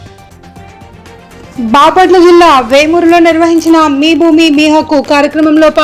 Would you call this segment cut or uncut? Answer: cut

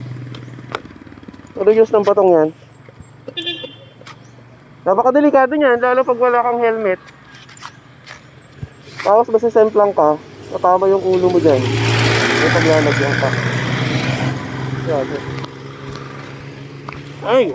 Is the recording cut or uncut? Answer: uncut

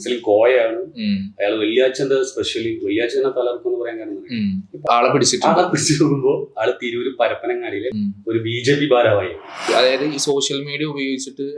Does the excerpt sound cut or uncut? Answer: cut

